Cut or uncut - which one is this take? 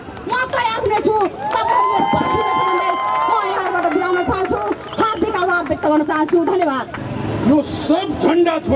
uncut